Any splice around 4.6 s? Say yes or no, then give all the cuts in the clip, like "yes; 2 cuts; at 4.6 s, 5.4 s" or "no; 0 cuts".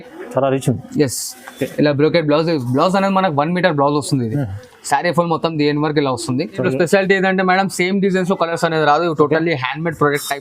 no; 1 cut; at 6.5 s